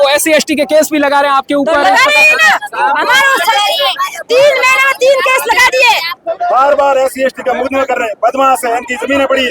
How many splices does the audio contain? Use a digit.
1